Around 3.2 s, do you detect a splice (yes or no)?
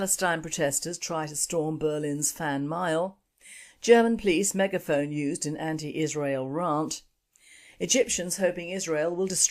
no